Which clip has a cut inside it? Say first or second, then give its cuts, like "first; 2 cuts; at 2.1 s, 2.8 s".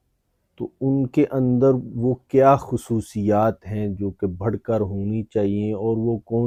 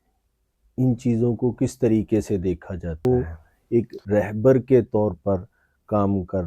second; 1 cut; at 3.1 s